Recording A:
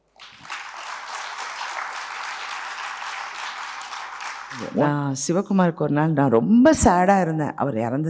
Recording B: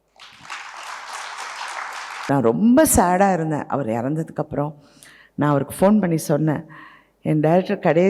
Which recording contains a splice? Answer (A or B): B